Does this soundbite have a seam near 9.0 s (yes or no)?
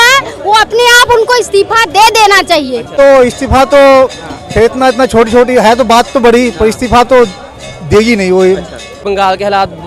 yes